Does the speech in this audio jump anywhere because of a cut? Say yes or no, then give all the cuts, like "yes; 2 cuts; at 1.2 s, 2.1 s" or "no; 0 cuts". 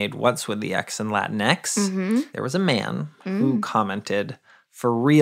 yes; 1 cut; at 2.4 s